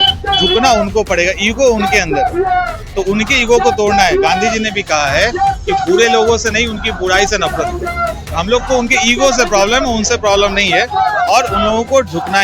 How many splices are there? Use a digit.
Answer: 0